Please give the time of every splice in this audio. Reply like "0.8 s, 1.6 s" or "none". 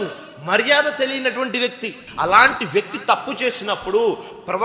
2.0 s